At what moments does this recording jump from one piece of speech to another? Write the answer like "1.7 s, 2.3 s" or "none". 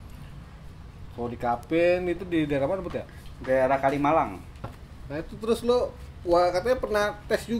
4.8 s